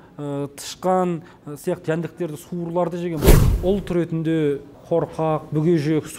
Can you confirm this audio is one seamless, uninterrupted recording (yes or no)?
no